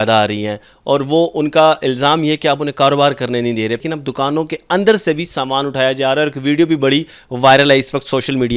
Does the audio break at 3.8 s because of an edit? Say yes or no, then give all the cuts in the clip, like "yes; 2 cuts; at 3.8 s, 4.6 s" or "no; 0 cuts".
yes; 1 cut; at 3.8 s